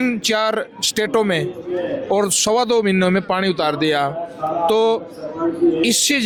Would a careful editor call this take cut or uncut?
uncut